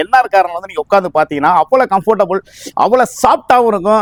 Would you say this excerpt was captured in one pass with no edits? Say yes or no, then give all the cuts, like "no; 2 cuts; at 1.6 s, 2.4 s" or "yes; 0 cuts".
yes; 0 cuts